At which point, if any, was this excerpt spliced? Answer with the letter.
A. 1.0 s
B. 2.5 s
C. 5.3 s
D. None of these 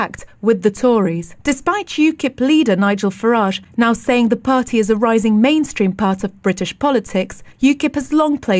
B